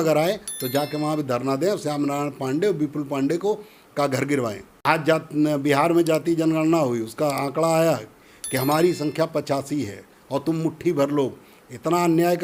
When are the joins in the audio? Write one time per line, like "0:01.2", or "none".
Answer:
0:04.7